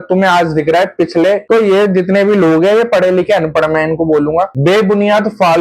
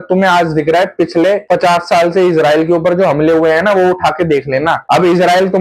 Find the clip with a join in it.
first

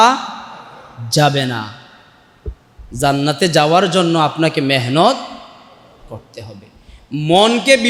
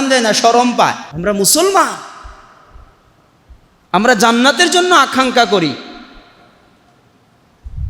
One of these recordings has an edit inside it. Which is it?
second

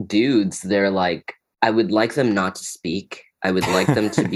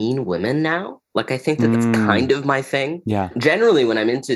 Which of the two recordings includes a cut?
second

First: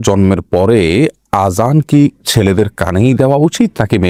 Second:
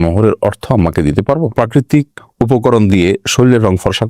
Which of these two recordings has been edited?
second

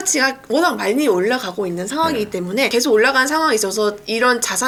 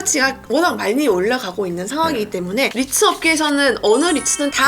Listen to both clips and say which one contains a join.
second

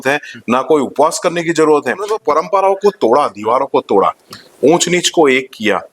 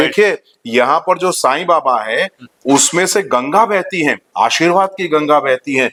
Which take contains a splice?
first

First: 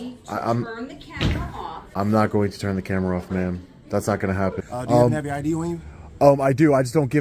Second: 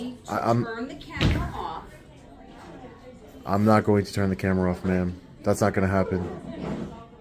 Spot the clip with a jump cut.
first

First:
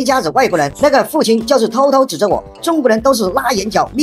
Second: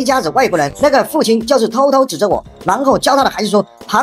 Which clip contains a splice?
first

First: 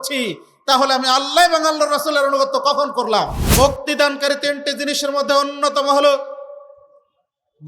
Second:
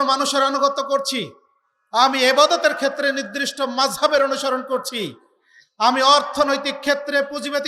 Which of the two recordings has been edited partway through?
first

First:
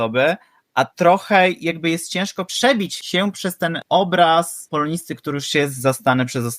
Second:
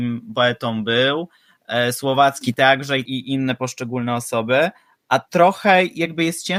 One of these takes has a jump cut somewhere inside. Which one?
first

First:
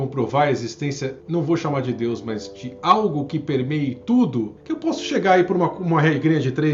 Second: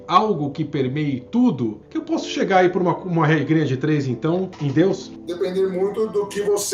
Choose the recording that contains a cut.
second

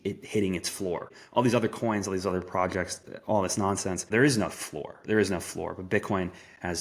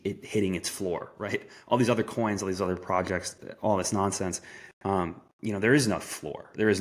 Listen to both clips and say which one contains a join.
first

